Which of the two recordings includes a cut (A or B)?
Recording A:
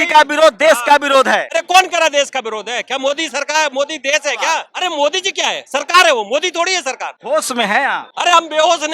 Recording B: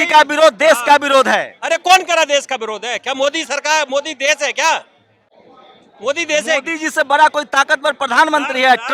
A